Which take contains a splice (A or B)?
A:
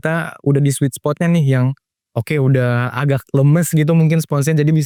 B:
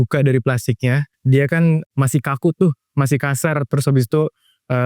B